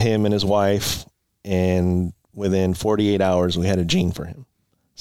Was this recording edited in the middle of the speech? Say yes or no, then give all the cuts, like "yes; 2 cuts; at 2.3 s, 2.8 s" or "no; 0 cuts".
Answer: no; 0 cuts